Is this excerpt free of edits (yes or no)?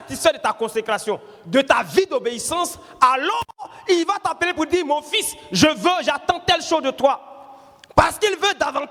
yes